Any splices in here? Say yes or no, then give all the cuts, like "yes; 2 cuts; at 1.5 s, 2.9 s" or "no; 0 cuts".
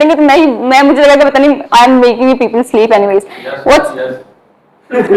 no; 0 cuts